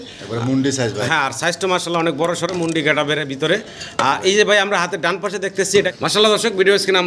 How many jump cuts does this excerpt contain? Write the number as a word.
one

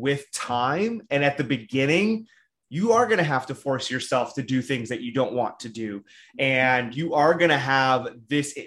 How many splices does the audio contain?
zero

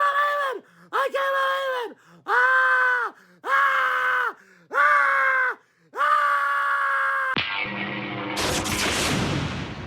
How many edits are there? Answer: one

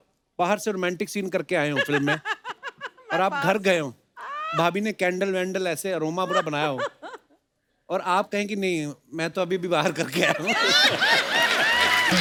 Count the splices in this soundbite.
zero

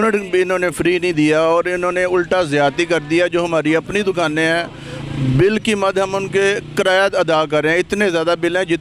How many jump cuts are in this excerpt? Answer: zero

